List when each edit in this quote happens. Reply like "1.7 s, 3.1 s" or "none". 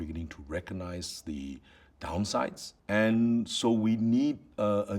2.7 s

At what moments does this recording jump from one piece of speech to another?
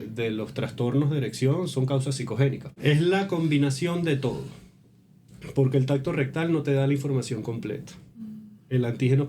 2.7 s

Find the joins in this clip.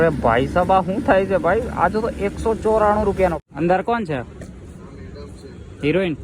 3.4 s

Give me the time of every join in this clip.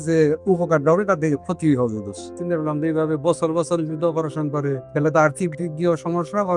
2.3 s, 4.8 s

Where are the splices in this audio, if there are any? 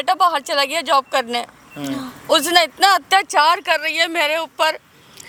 none

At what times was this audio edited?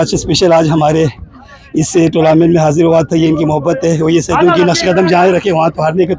none

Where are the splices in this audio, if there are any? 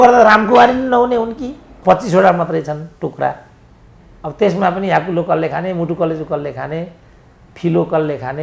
1.7 s

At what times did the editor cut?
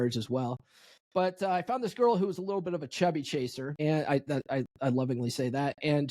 3.6 s

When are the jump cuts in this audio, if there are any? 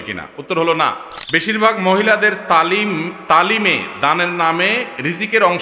1.1 s

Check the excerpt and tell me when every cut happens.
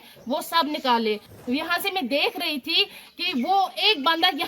1.3 s

